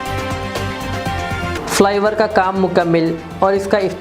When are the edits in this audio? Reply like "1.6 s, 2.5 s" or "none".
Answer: 1.5 s